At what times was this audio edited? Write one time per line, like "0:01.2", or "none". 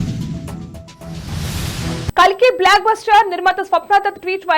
0:02.1